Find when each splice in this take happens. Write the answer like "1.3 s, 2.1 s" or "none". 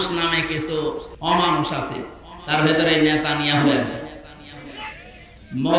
1.1 s